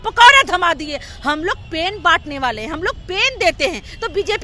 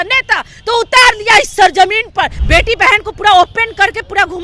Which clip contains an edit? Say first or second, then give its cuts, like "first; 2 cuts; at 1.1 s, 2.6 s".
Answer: second; 1 cut; at 2.4 s